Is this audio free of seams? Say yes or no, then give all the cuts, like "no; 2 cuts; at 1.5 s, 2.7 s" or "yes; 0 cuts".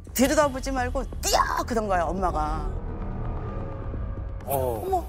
yes; 0 cuts